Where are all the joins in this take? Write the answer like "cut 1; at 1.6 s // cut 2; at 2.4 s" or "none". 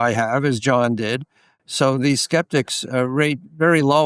cut 1; at 1.5 s